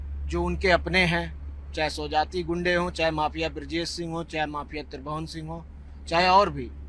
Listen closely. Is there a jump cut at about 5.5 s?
no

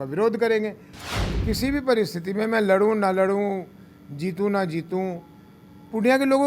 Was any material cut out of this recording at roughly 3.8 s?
no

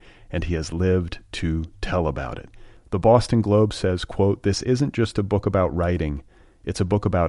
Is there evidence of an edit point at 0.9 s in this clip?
no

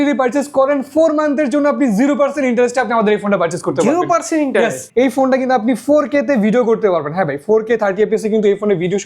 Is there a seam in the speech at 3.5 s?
no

